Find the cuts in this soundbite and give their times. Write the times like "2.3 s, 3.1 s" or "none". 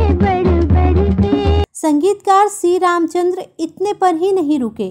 1.6 s